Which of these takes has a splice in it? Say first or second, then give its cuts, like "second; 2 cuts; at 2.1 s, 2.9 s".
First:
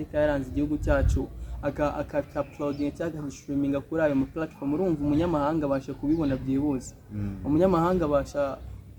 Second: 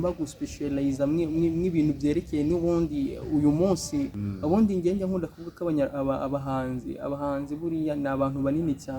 second; 1 cut; at 4.2 s